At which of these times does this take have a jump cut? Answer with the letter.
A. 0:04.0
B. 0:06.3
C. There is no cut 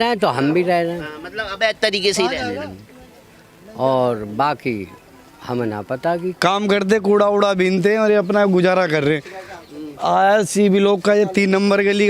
B